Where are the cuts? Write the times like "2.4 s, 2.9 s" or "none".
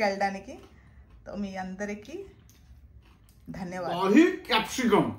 3.8 s